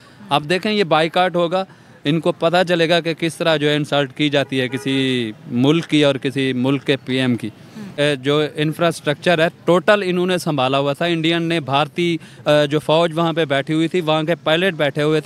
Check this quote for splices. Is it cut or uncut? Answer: cut